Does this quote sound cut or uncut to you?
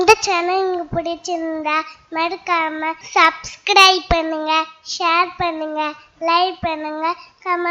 cut